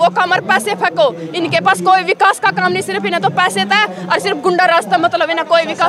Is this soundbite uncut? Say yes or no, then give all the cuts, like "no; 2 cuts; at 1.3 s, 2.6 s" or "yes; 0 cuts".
yes; 0 cuts